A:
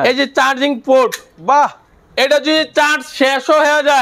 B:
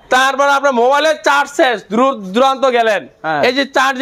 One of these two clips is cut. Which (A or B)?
A